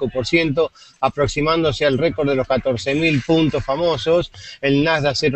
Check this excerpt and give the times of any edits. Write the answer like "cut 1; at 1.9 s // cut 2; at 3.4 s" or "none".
cut 1; at 3.2 s